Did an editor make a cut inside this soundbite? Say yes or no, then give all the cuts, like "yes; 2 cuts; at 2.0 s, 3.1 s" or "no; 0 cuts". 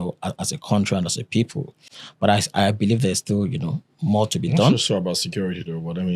no; 0 cuts